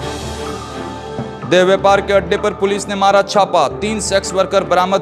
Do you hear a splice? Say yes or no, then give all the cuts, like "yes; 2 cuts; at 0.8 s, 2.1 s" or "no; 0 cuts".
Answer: yes; 1 cut; at 1.3 s